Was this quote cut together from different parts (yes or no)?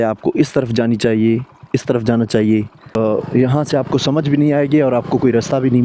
yes